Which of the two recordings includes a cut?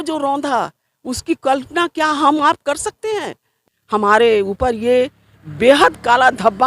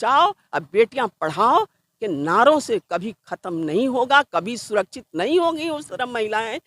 first; 1 cut; at 3.6 s

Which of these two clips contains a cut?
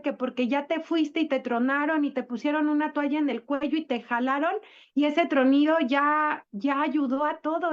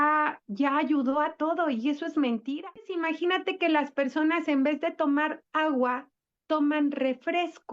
second; 1 cut; at 3.0 s

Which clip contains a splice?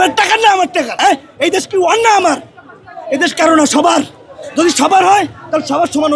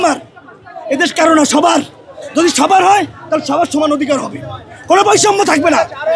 first; 1 cut; at 0.9 s

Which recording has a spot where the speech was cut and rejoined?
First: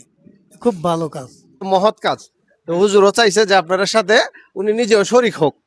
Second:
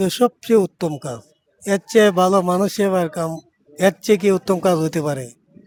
first; 1 cut; at 1.6 s

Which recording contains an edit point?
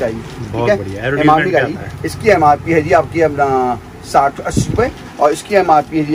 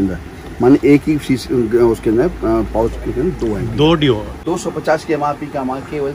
second; 1 cut; at 4.3 s

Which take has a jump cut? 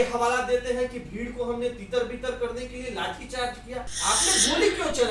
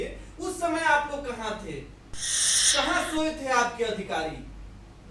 first; 1 cut; at 3.9 s

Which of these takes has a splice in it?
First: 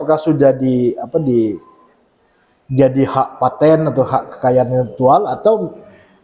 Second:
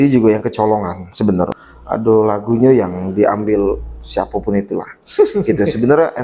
second; 1 cut; at 1.7 s

